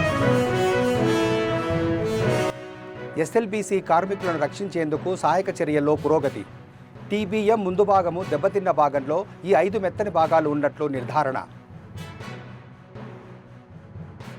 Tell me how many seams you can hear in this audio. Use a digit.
1